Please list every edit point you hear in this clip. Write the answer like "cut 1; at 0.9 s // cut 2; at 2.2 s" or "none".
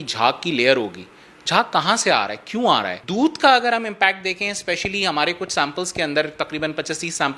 cut 1; at 3.0 s